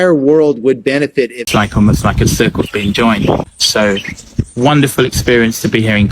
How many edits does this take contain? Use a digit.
1